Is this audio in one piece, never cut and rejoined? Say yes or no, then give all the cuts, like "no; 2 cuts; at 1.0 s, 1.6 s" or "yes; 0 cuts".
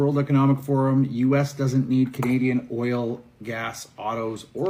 yes; 0 cuts